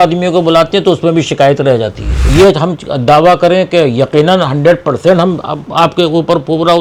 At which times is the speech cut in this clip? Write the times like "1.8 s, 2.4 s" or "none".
2.3 s